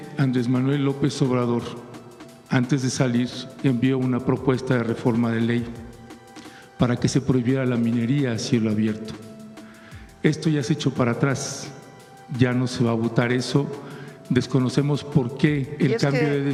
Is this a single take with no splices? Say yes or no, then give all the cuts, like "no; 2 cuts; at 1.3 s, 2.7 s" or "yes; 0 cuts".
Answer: yes; 0 cuts